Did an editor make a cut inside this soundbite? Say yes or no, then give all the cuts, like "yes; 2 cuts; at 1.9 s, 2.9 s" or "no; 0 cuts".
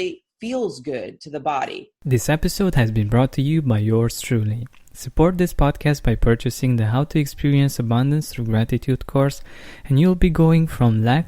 yes; 1 cut; at 1.9 s